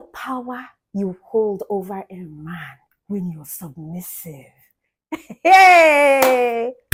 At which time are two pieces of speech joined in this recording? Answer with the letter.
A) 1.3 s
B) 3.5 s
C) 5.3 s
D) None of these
D